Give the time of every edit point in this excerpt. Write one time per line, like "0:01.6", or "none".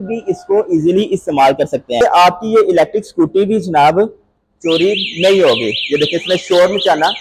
0:02.0